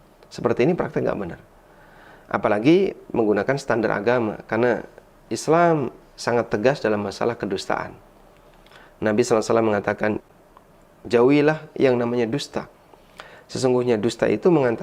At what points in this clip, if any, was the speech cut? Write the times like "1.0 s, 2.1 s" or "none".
10.3 s